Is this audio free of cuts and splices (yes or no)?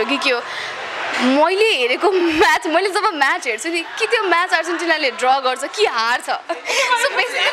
yes